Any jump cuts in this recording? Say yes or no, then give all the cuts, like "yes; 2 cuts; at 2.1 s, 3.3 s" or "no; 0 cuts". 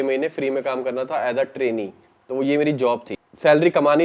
yes; 1 cut; at 3.1 s